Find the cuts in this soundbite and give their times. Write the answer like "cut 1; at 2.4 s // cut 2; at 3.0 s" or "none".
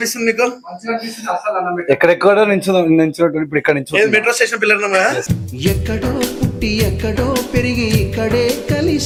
none

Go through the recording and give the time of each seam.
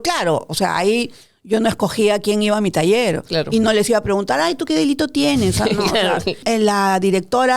cut 1; at 6.4 s

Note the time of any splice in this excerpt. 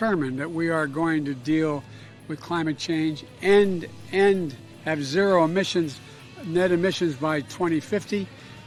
none

